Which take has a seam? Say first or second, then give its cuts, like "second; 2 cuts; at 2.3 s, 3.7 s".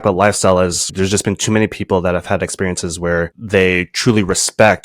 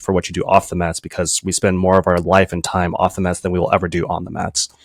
first; 1 cut; at 0.9 s